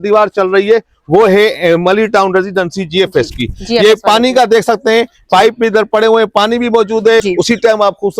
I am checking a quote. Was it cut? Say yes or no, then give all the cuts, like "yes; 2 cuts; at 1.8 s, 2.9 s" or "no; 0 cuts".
yes; 1 cut; at 7.2 s